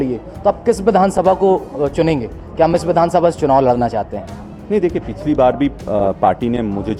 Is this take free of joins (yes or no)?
yes